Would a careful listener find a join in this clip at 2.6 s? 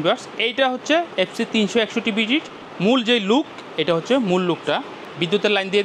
yes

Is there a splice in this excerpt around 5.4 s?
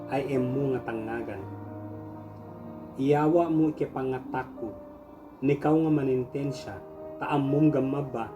no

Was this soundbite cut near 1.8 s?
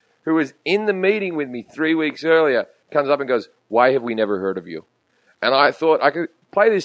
no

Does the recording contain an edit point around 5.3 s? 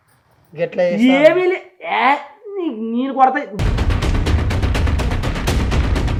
no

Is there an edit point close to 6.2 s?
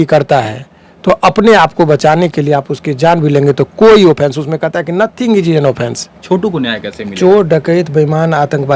yes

